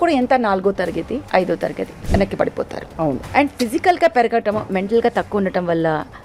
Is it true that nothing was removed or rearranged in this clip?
no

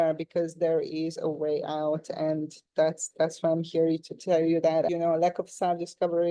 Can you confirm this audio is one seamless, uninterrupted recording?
no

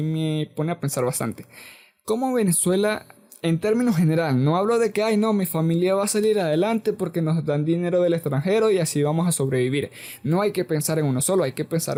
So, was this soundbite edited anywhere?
no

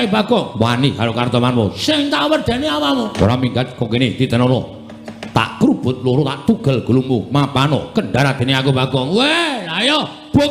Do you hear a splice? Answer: yes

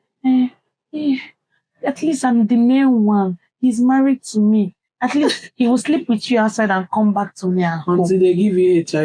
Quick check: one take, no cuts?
yes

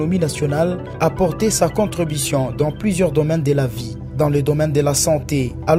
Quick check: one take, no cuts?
yes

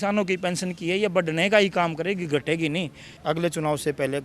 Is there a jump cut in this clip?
yes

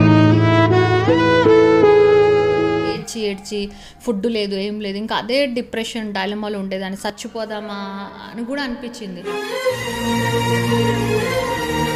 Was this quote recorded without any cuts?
no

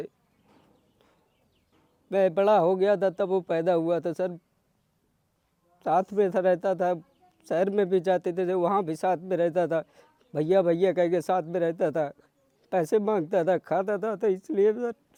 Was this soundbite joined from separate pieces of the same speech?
no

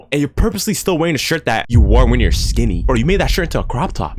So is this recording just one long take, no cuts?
yes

